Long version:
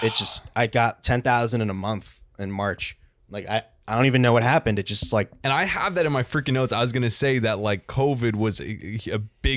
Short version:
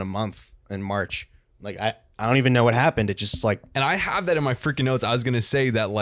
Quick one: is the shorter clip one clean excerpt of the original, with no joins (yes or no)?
yes